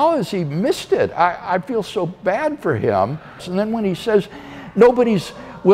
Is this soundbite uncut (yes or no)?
no